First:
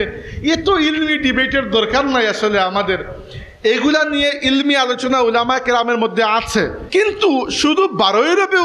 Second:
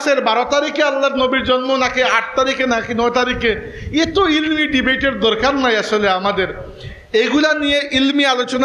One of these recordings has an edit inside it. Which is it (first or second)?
first